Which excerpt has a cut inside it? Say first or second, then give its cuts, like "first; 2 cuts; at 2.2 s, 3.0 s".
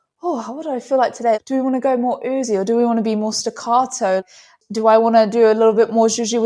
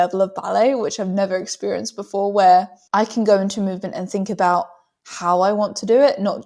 first; 2 cuts; at 1.4 s, 4.2 s